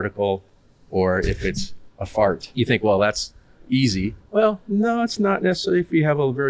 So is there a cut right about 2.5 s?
yes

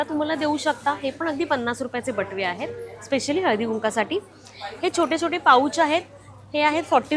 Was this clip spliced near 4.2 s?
no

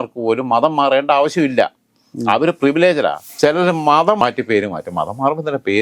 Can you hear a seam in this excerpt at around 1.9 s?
no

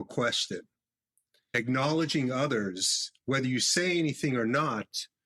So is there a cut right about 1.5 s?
yes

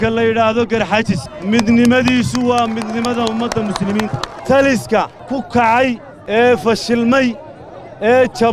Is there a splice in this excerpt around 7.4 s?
no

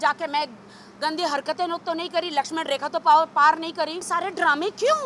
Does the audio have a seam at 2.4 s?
no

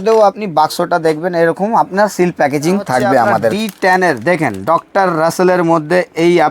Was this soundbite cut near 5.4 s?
no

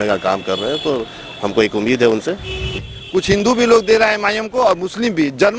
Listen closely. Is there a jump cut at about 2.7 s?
yes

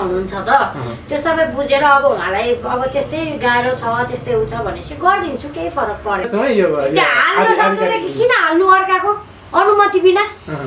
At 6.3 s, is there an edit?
yes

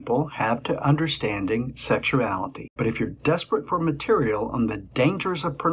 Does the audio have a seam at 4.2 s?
no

